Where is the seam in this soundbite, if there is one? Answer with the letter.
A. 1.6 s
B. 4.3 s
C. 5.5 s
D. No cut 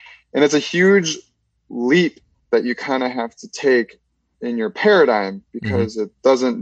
B